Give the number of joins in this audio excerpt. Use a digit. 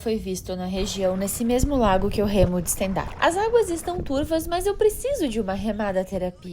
1